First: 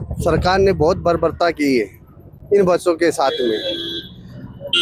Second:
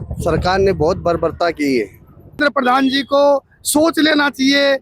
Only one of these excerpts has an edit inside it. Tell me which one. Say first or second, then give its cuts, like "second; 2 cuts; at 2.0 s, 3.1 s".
second; 1 cut; at 2.4 s